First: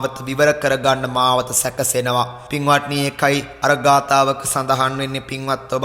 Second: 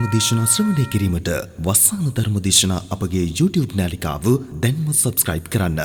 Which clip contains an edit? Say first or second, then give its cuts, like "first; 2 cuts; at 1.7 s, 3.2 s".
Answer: first; 2 cuts; at 2.4 s, 3.5 s